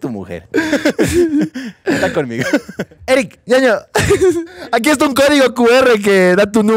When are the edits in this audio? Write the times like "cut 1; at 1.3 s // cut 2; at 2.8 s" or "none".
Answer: cut 1; at 2.9 s // cut 2; at 4.5 s